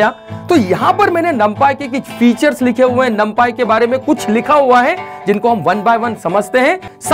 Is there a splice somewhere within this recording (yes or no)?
no